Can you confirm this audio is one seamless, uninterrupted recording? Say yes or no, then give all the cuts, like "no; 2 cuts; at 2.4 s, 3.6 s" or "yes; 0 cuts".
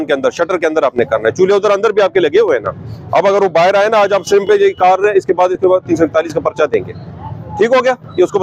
yes; 0 cuts